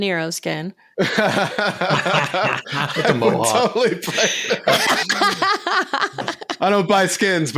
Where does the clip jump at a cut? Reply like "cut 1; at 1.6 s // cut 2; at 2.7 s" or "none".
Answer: none